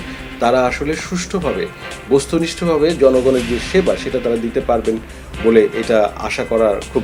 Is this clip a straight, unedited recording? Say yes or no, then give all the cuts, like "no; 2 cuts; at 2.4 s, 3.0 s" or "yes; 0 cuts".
yes; 0 cuts